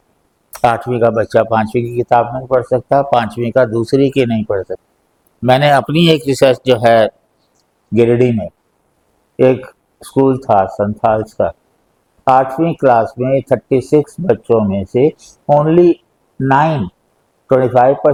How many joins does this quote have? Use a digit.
0